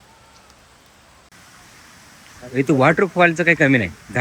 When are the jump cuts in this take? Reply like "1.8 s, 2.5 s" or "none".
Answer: 1.3 s

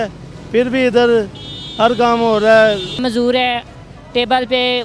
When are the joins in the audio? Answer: 3.0 s

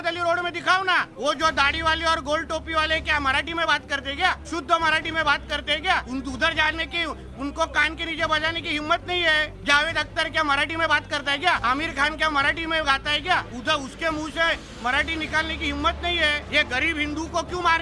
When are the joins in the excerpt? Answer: none

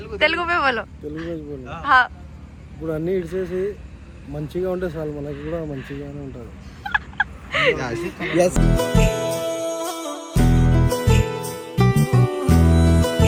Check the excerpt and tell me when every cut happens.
none

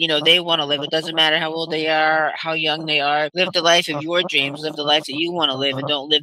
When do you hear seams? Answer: none

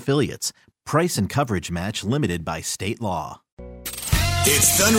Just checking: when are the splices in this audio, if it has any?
3.9 s

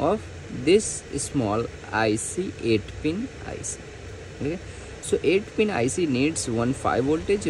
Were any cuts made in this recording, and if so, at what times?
none

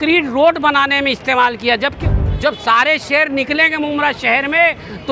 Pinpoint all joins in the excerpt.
2.0 s

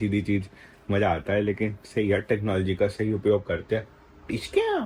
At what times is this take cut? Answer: none

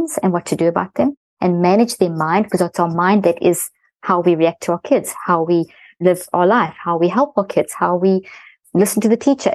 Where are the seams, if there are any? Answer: 5.8 s

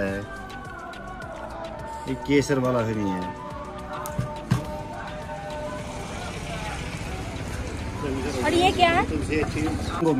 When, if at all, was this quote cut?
none

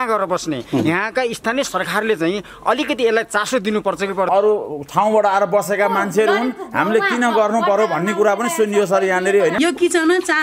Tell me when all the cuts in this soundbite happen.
4.3 s, 9.5 s

